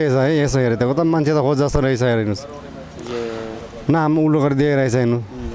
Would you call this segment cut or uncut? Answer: uncut